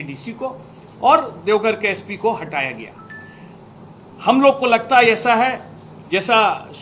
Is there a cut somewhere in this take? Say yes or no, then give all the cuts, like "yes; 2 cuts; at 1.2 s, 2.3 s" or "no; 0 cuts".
no; 0 cuts